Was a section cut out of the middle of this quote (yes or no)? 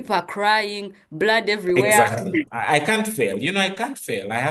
yes